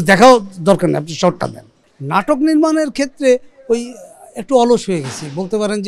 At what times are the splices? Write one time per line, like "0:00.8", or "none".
0:01.8